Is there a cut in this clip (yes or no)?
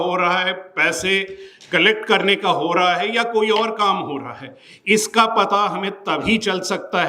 no